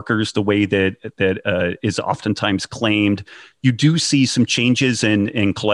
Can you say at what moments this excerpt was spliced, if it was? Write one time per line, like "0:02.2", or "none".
none